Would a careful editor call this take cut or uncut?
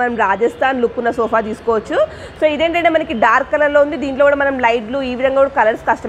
uncut